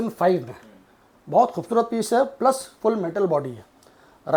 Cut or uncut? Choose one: uncut